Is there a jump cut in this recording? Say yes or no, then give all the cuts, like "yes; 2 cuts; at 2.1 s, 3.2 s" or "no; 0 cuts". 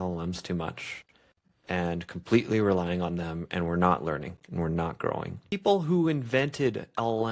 yes; 1 cut; at 5.5 s